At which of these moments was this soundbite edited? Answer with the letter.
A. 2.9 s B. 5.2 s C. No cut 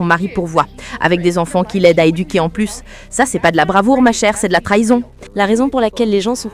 B